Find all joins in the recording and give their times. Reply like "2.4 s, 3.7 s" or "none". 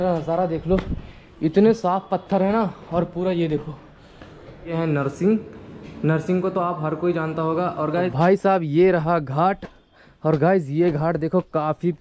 4.7 s, 7.9 s